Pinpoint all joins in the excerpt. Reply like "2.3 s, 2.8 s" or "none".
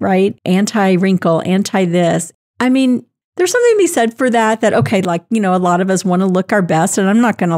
2.3 s